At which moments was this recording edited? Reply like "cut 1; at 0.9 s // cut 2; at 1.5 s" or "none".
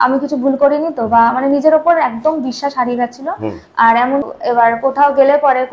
cut 1; at 4.3 s